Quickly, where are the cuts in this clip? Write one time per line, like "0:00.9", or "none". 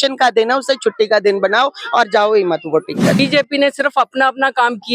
0:03.2